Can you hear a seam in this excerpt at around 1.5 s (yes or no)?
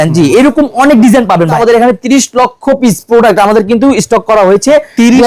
yes